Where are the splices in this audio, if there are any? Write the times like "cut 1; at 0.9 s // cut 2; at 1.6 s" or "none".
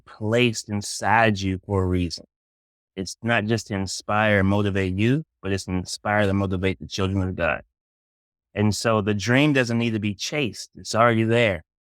none

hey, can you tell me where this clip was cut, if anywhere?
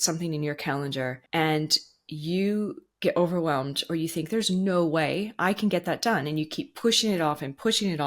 cut 1; at 1.2 s

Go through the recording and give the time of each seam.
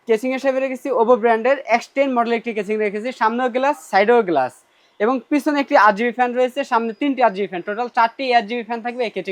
none

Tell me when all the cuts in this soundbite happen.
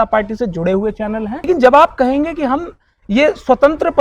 cut 1; at 1.5 s

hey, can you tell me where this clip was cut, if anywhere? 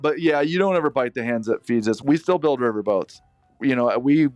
cut 1; at 2.0 s // cut 2; at 3.5 s

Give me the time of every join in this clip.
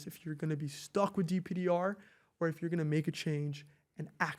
none

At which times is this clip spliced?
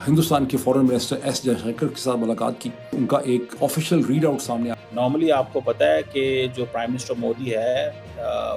cut 1; at 2.9 s // cut 2; at 4.7 s

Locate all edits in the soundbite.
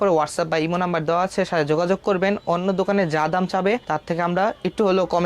none

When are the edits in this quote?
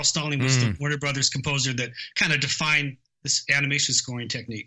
none

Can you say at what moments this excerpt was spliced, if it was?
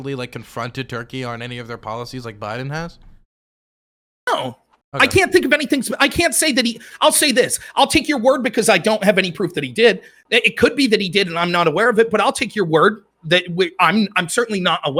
none

